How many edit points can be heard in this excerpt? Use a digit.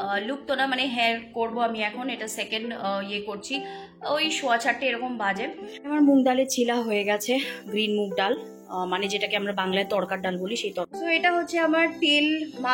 2